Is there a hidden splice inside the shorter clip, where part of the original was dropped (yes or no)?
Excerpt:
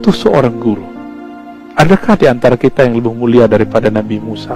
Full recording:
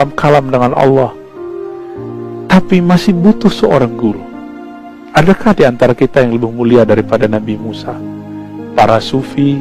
no